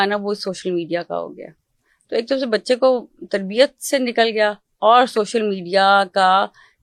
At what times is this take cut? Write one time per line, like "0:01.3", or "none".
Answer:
none